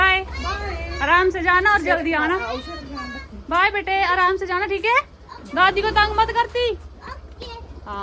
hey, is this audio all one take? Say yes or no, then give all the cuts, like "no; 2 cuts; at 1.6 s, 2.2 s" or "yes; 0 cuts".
yes; 0 cuts